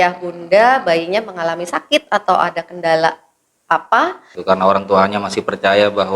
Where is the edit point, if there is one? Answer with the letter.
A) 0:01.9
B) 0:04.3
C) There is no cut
B